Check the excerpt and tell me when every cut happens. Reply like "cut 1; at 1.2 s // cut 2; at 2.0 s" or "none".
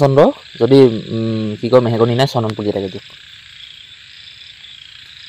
none